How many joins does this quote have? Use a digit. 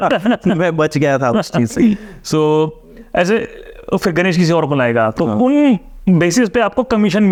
0